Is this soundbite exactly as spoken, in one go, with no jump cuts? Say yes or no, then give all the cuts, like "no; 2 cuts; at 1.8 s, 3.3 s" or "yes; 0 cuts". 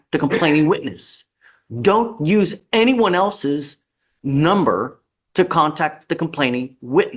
yes; 0 cuts